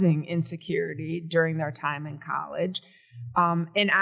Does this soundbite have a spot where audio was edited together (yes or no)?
no